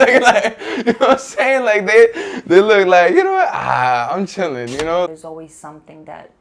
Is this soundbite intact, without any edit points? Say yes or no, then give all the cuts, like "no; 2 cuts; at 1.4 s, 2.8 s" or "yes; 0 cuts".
no; 1 cut; at 5.1 s